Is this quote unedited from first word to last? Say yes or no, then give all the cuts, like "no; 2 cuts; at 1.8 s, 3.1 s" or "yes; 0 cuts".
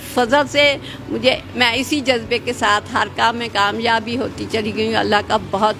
yes; 0 cuts